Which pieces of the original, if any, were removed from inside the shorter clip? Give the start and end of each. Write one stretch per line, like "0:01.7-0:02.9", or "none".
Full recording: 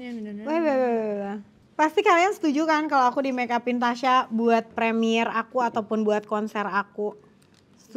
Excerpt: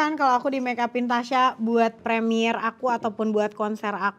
none